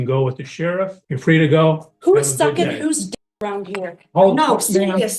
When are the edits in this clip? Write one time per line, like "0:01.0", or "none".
0:01.0

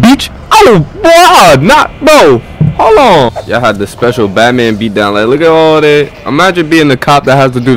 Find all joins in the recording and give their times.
0:03.3

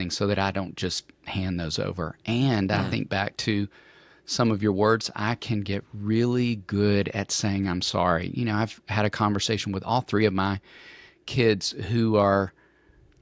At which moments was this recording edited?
none

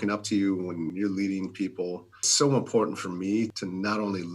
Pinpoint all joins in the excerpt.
0:00.9
0:02.2
0:03.5

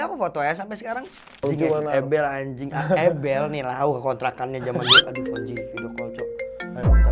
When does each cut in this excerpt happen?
0:01.4

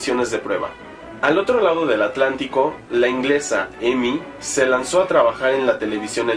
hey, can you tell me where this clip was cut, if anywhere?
none

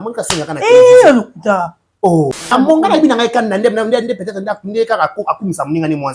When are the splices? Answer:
0:02.5

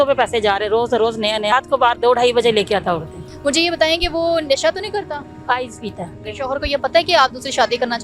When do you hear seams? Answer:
0:01.5
0:03.2
0:06.3

